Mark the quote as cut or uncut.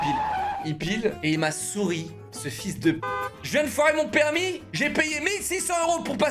cut